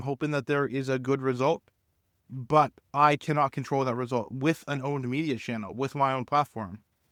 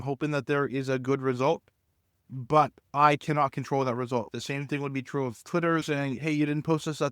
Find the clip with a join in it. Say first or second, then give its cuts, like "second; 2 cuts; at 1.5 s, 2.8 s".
second; 2 cuts; at 4.3 s, 5.8 s